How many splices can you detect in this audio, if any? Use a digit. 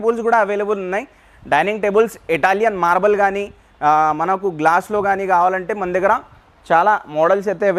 0